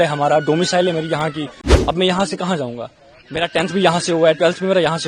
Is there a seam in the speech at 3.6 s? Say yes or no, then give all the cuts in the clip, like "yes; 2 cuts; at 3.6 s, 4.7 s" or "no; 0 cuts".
no; 1 cut; at 1.7 s